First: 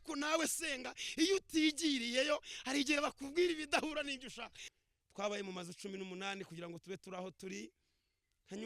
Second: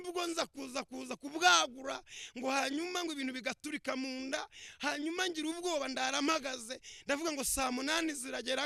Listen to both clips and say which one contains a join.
first; 1 cut; at 4.6 s

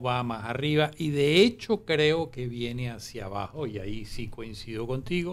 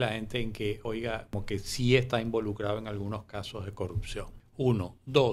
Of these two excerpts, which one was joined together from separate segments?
second; 2 cuts; at 0.9 s, 4.4 s

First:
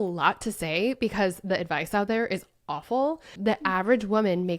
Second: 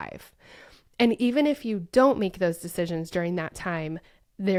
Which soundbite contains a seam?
first; 1 cut; at 3.3 s

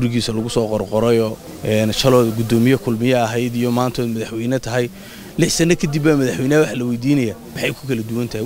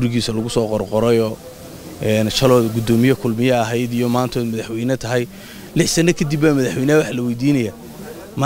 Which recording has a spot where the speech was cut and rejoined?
first; 2 cuts; at 1.5 s, 7.5 s

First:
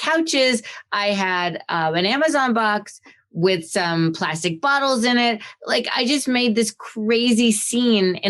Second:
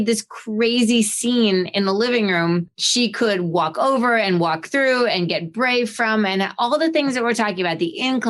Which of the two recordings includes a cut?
second; 1 cut; at 2.8 s

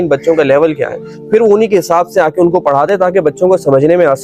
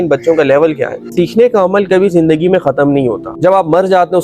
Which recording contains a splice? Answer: second; 2 cuts; at 1.1 s, 3.2 s

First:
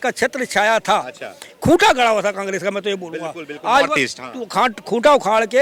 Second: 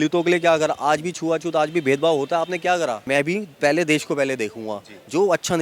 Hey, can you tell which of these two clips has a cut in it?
second; 1 cut; at 3.1 s

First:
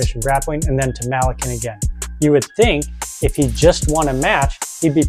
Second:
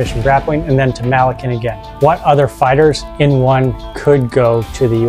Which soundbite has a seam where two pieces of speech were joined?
second; 1 cut; at 1.8 s

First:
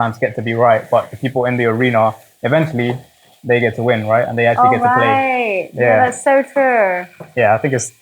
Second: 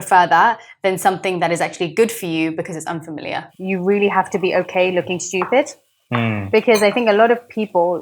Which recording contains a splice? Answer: second; 1 cut; at 3.5 s

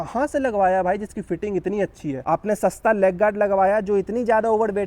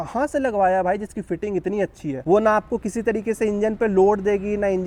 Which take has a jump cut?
first; 1 cut; at 2.2 s

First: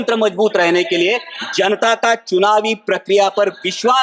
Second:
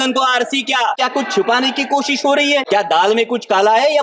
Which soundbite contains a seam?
second; 2 cuts; at 1.0 s, 2.6 s

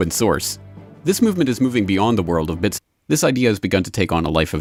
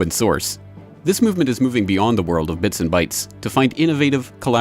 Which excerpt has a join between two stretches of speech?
second; 1 cut; at 2.8 s

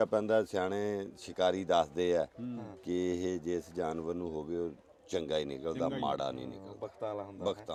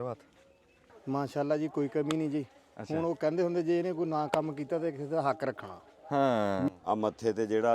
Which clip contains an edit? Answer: second; 2 cuts; at 0.9 s, 6.7 s

